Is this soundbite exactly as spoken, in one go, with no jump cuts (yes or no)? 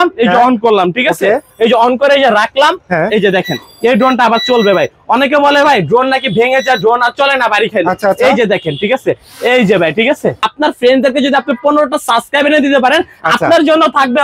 no